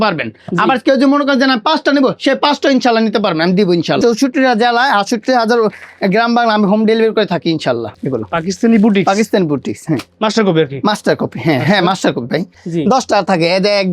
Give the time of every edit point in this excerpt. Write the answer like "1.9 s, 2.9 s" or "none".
4.0 s, 8.0 s, 12.6 s